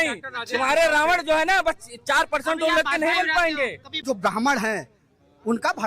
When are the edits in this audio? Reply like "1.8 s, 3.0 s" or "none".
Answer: 3.9 s

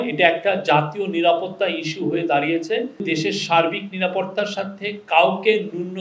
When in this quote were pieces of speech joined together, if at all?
3.0 s

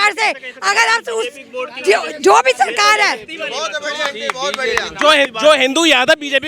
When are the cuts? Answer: 5.3 s

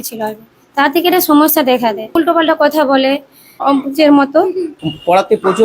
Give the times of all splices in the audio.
2.1 s, 3.6 s, 4.7 s

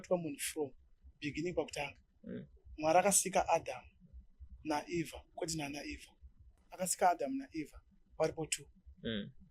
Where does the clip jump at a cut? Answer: 6.8 s

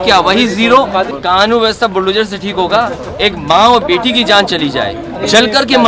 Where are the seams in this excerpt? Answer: 1.1 s

